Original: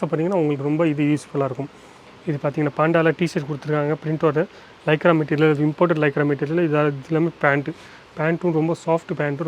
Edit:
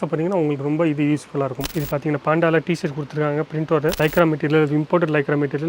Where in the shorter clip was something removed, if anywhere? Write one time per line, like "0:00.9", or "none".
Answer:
0:01.7
0:03.9